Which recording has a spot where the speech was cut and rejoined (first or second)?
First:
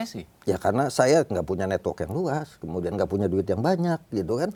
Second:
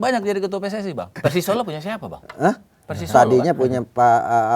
second